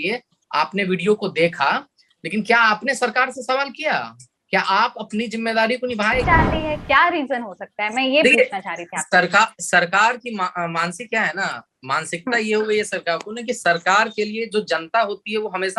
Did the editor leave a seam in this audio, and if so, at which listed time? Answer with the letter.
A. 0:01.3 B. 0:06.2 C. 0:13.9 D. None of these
B